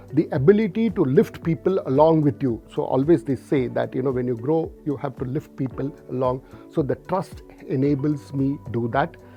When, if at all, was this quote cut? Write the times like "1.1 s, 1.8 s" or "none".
none

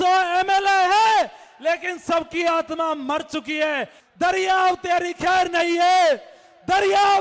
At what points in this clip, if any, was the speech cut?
4.0 s

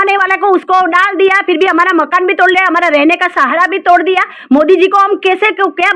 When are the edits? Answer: none

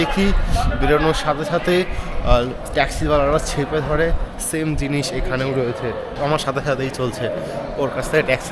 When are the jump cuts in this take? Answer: 6.1 s

